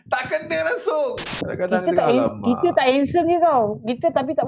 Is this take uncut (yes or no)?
no